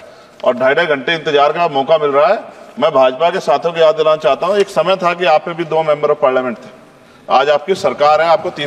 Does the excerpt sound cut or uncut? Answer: uncut